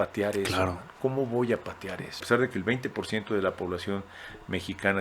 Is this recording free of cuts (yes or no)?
no